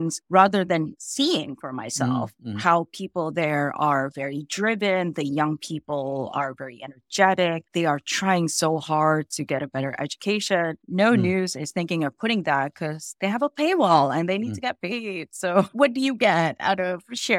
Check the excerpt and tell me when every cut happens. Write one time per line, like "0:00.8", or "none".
0:10.8